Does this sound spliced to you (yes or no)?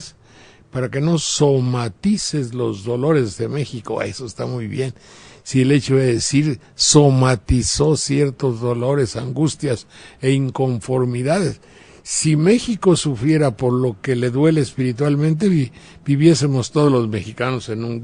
yes